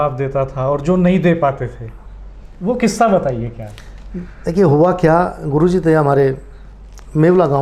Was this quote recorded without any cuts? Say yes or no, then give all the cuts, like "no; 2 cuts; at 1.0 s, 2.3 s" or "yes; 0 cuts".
yes; 0 cuts